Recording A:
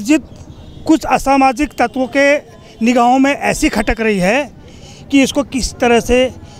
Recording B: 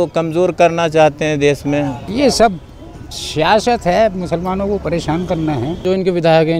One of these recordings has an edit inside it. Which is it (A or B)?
B